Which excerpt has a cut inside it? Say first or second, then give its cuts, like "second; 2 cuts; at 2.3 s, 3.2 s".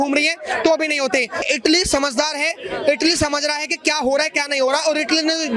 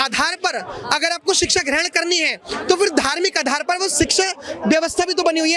first; 1 cut; at 1.5 s